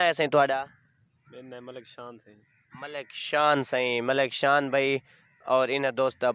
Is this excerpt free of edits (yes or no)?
yes